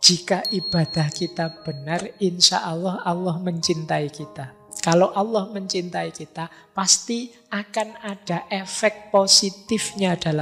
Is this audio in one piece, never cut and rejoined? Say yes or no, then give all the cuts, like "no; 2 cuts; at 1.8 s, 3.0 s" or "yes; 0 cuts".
yes; 0 cuts